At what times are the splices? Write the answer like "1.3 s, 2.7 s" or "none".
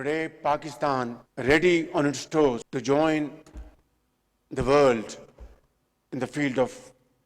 1.2 s, 2.7 s